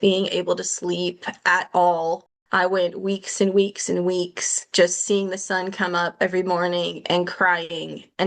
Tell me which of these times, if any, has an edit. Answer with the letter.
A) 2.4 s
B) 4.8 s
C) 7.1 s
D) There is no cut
A